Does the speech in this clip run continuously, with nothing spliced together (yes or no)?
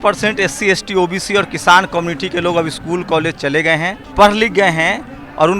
no